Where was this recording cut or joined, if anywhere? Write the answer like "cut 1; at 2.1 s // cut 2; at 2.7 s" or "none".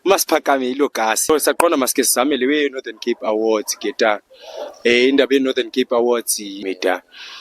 cut 1; at 1.3 s // cut 2; at 6.6 s

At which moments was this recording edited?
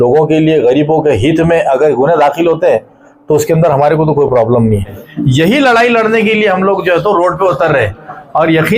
cut 1; at 5.0 s

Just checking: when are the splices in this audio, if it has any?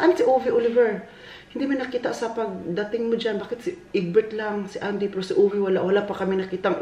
none

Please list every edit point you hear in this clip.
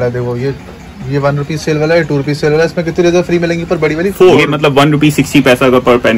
cut 1; at 4.5 s

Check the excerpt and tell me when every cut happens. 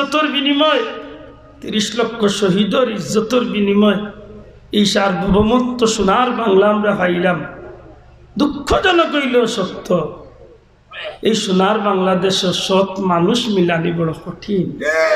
none

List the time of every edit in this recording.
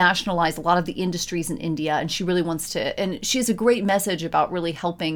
none

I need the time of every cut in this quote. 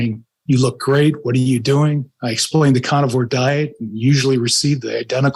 none

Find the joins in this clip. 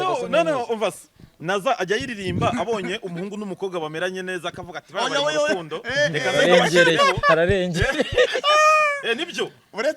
none

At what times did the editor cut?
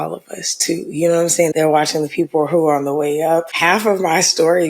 cut 1; at 1.5 s // cut 2; at 3.5 s

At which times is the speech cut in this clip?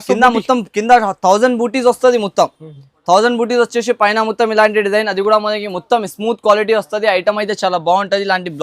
none

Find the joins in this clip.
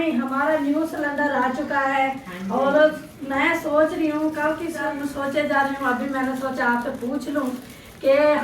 cut 1; at 4.8 s

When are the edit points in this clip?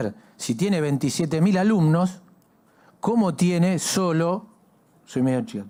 none

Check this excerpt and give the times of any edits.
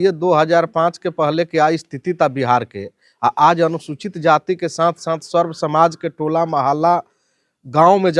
none

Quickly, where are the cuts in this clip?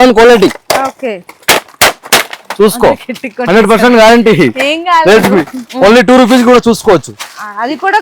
cut 1; at 5.6 s

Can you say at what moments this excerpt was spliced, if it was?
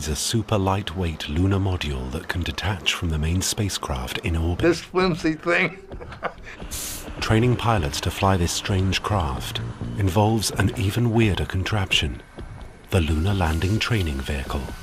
none

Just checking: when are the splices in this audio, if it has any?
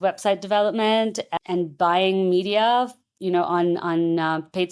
cut 1; at 1.2 s

